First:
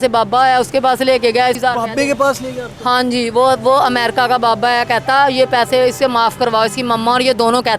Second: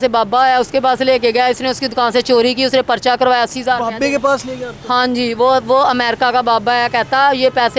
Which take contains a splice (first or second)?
first